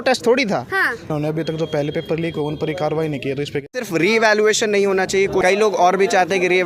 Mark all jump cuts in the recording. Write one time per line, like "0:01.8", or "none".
0:01.1
0:03.8
0:05.4